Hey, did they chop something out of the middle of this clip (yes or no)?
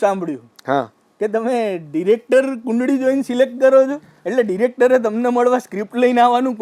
no